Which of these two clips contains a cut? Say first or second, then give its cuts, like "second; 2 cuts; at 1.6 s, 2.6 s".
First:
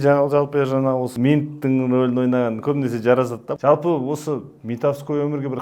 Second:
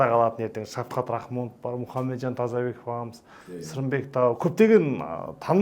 first; 2 cuts; at 1.1 s, 3.5 s